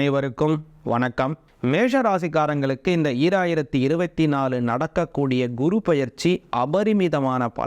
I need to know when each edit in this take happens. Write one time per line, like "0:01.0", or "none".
0:01.5

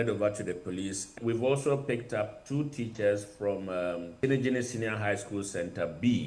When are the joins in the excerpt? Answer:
0:01.0
0:04.1

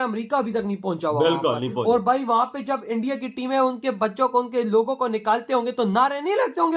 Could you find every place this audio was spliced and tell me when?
none

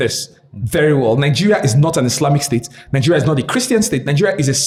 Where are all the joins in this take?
none

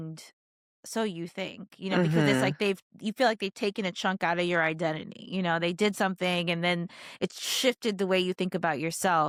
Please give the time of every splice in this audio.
none

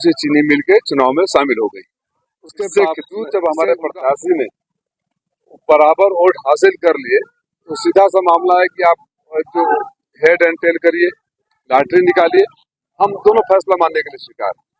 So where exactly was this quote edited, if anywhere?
0:03.1

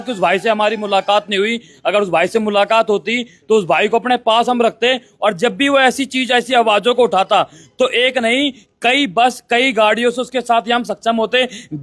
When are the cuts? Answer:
none

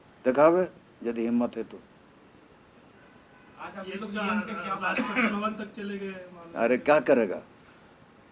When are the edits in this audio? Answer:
none

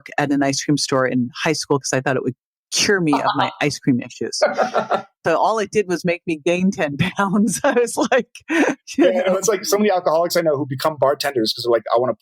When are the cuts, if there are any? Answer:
0:05.2

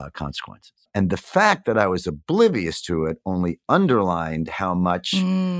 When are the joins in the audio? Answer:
none

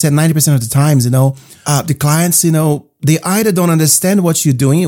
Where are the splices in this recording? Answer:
0:01.5

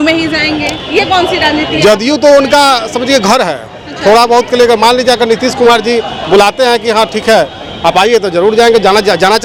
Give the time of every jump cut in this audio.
none

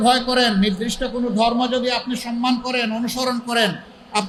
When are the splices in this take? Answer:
none

